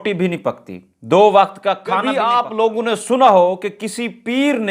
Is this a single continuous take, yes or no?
no